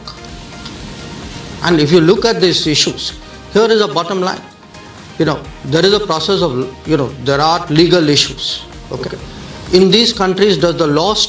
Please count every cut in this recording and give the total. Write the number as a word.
zero